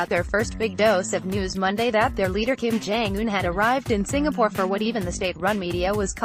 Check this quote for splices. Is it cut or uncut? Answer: uncut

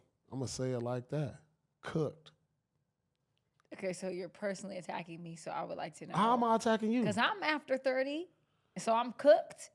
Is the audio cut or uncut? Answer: uncut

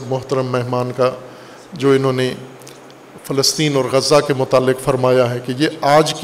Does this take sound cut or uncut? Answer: uncut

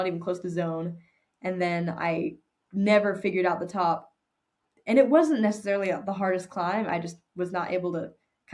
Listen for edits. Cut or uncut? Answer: uncut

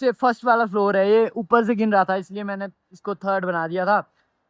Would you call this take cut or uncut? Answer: uncut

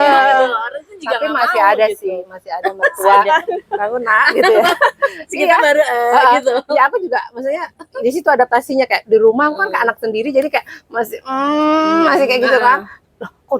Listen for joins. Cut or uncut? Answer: cut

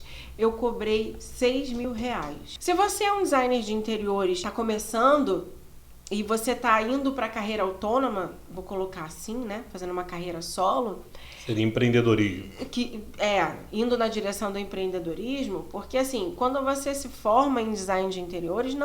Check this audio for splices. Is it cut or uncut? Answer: cut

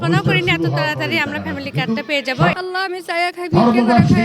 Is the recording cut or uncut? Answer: cut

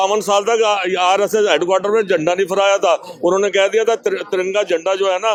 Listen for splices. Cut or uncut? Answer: uncut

